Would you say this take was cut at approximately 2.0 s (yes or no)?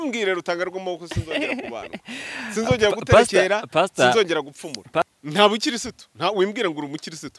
no